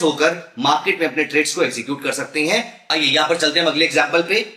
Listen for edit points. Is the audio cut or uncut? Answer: cut